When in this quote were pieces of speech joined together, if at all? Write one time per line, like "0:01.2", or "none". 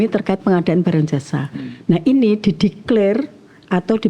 none